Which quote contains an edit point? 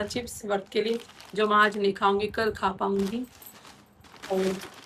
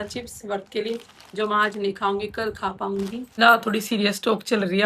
second; 1 cut; at 3.4 s

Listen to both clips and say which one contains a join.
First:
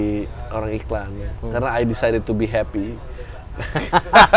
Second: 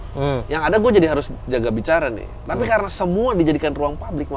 second; 1 cut; at 2.3 s

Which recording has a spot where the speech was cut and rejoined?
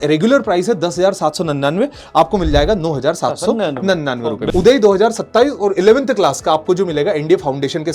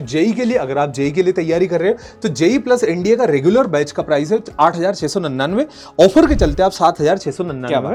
first; 1 cut; at 4.4 s

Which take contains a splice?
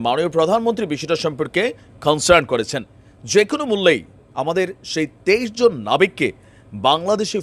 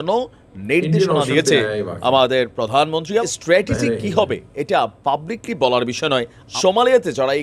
second; 2 cuts; at 3.3 s, 6.4 s

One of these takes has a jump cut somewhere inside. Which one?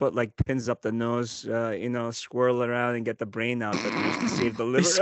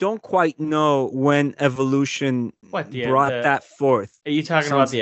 second; 3 cuts; at 1.1 s, 2.6 s, 4.1 s

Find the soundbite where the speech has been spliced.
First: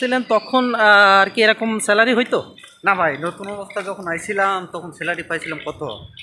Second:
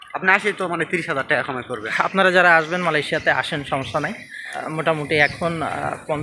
second; 2 cuts; at 1.9 s, 4.6 s

